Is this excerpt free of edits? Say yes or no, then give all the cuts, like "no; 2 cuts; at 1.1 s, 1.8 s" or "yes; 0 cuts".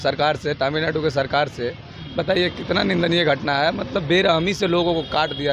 yes; 0 cuts